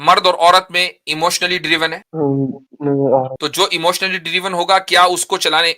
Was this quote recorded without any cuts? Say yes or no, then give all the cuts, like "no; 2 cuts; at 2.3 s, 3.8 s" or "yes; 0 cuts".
no; 2 cuts; at 2.0 s, 3.4 s